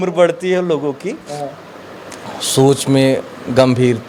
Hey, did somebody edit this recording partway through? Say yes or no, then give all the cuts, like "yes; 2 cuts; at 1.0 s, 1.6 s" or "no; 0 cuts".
no; 0 cuts